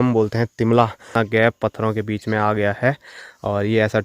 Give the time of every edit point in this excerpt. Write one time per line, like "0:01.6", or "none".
0:01.0